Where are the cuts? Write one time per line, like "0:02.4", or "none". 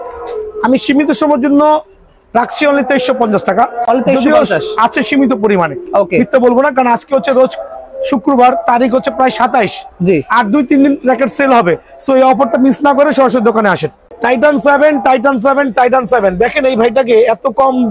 none